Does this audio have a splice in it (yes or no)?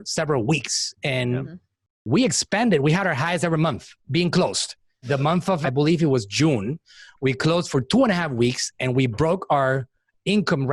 no